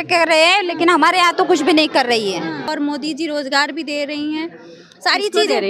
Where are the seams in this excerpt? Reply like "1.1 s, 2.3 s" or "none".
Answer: 2.7 s